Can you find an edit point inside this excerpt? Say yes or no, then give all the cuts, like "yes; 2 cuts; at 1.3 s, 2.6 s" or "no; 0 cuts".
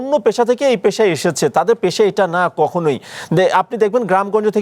no; 0 cuts